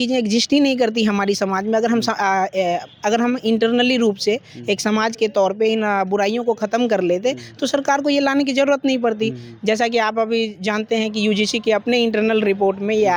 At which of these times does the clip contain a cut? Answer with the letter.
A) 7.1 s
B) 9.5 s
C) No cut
C